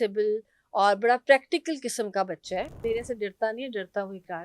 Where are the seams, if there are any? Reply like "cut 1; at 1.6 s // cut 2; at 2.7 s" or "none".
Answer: cut 1; at 2.8 s